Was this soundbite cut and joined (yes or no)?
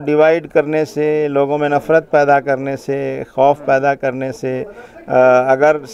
no